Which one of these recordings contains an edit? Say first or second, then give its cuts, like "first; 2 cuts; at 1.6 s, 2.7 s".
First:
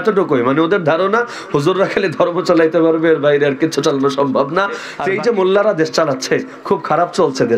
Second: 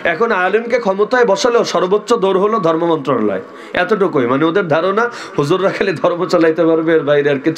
first; 1 cut; at 4.9 s